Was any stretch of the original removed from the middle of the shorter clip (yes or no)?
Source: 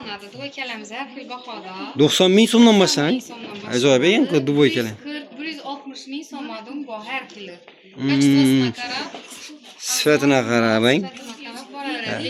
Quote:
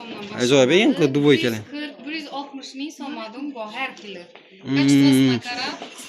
no